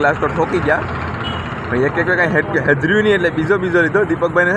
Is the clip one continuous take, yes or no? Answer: yes